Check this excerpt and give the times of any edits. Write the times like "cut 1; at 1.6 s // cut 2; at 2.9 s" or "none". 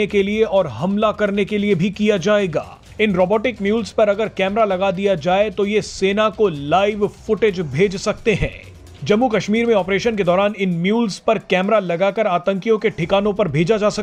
none